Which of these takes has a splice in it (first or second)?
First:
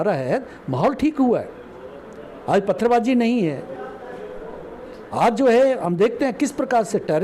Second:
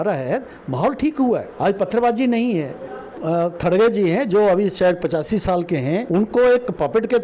second